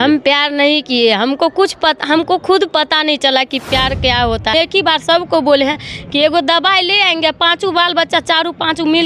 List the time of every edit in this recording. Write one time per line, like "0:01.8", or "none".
0:04.5